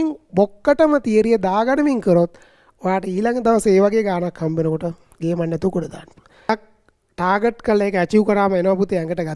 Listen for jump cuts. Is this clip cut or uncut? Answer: cut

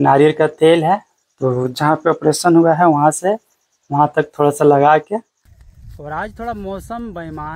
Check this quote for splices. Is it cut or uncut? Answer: cut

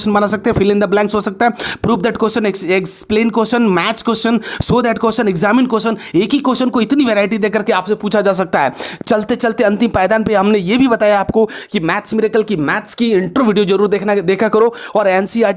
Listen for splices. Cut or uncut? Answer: uncut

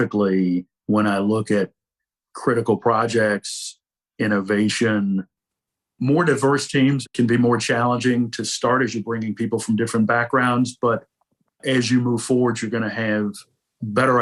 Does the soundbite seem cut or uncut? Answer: uncut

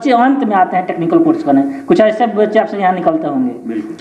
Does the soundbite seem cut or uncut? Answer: uncut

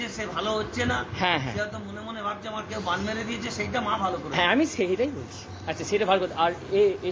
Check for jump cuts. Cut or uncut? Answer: uncut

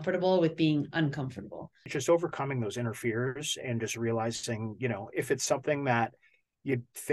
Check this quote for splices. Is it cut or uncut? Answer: cut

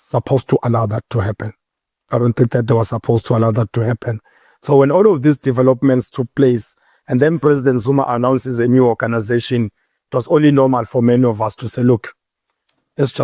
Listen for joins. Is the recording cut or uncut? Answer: uncut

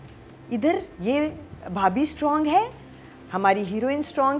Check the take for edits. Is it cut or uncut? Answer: uncut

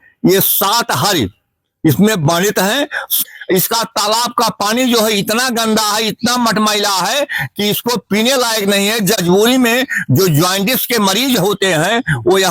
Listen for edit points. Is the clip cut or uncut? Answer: cut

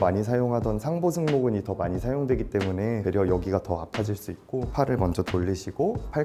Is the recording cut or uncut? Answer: uncut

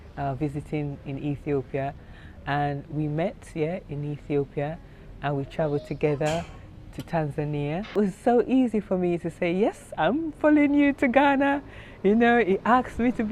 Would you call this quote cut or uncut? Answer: cut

